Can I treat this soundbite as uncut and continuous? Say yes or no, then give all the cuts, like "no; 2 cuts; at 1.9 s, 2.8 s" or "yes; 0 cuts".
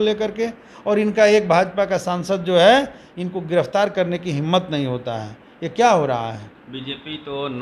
no; 1 cut; at 6.5 s